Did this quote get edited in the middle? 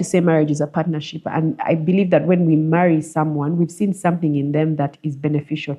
no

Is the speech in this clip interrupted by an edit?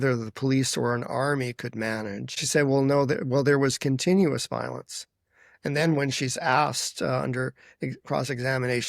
yes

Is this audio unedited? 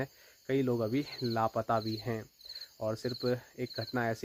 yes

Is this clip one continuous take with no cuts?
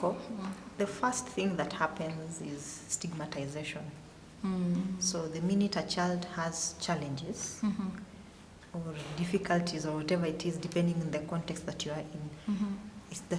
yes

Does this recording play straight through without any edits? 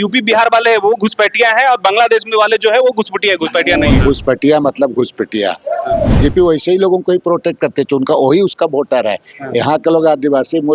no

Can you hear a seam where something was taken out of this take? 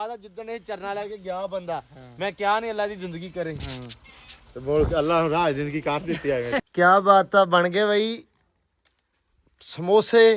yes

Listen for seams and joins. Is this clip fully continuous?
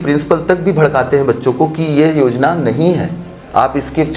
yes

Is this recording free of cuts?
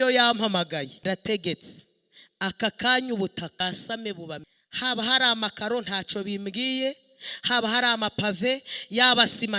no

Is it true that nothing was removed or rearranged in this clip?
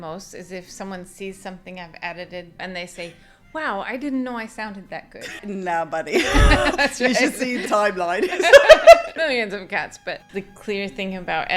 no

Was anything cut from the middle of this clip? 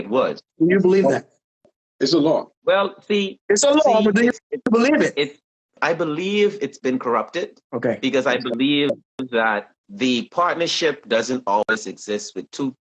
yes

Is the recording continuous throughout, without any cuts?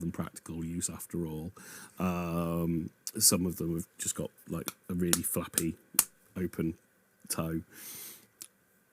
yes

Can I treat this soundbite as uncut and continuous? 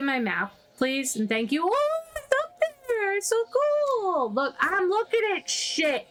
yes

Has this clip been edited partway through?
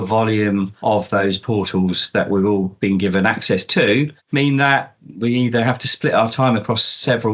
yes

